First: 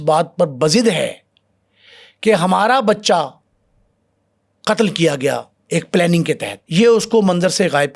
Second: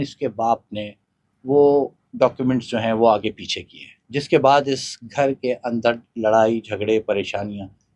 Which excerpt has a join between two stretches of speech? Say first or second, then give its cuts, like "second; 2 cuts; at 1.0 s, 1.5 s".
first; 1 cut; at 6.5 s